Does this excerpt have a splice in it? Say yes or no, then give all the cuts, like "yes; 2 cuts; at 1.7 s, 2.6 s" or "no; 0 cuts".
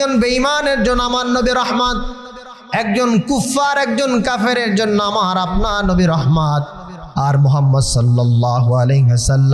no; 0 cuts